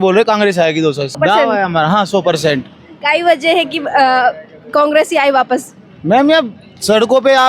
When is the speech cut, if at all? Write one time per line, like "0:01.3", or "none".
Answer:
none